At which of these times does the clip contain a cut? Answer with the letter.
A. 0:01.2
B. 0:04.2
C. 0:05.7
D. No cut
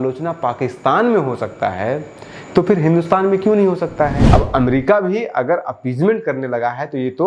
B